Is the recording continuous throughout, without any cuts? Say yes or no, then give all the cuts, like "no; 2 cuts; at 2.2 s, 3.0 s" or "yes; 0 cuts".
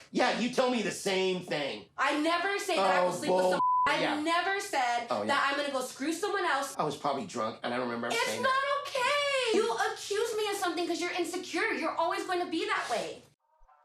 yes; 0 cuts